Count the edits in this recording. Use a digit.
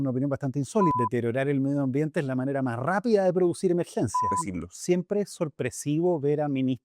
2